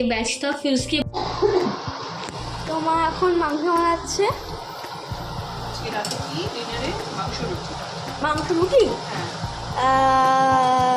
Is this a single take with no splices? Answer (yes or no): no